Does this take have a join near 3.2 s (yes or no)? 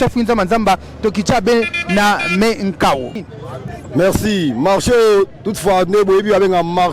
yes